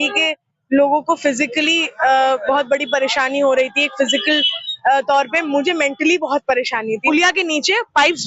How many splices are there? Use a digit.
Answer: 1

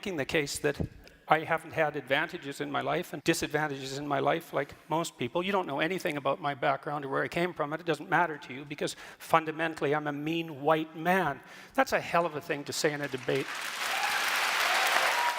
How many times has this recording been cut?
1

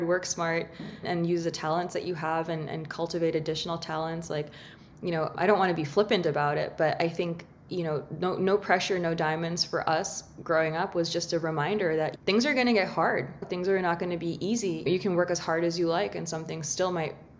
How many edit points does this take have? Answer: 3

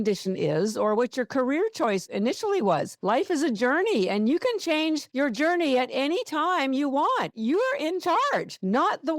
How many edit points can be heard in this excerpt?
2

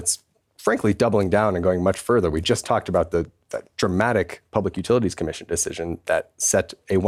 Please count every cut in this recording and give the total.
0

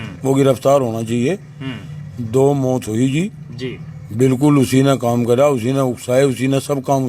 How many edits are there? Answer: 0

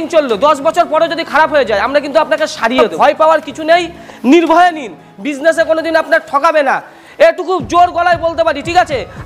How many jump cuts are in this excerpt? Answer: 1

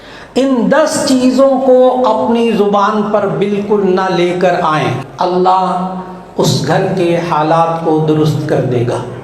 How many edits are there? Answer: 1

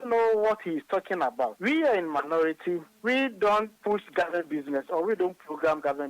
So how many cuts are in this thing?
1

